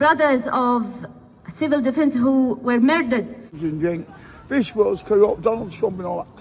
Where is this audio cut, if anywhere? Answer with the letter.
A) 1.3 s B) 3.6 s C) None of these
B